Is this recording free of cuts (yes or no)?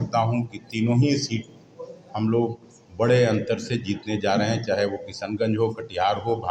yes